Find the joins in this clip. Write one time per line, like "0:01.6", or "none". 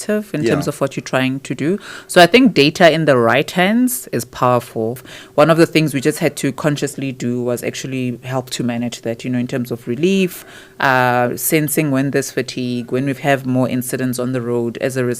0:05.1